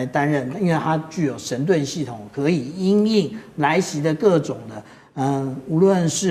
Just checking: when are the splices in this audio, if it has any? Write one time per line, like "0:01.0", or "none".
none